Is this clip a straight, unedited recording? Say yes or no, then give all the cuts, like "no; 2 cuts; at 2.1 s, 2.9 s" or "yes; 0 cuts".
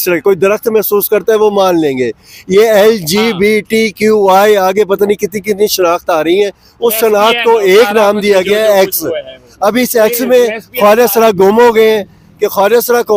yes; 0 cuts